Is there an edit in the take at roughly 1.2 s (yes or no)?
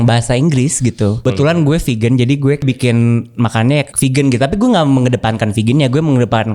yes